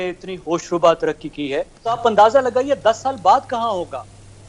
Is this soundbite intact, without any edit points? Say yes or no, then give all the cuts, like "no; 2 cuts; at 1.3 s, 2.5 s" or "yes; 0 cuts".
no; 1 cut; at 2.0 s